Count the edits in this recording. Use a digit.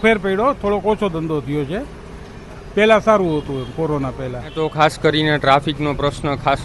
1